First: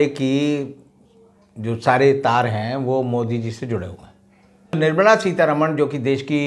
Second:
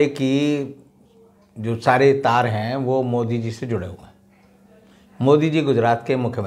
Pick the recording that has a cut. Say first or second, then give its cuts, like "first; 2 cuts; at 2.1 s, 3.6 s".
first; 1 cut; at 4.8 s